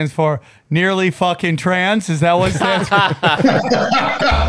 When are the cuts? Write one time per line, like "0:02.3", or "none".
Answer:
0:03.4